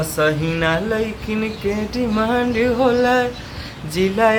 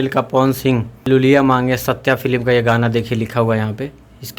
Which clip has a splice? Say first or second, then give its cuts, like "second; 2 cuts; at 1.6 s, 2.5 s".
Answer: second; 1 cut; at 0.9 s